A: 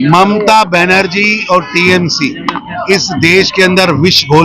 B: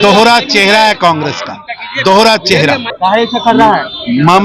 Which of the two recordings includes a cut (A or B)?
B